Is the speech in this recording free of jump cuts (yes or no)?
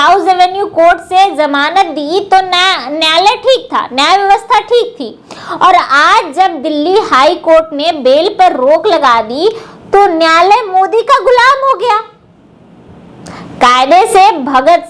yes